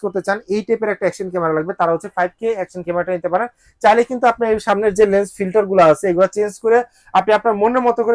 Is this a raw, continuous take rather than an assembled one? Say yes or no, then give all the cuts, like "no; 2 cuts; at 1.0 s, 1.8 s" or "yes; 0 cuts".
yes; 0 cuts